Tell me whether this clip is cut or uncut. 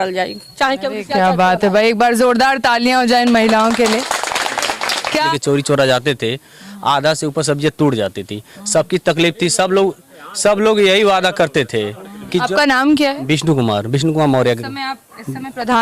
cut